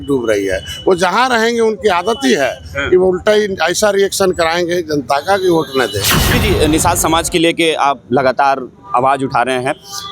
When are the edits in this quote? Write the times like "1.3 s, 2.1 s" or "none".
6.3 s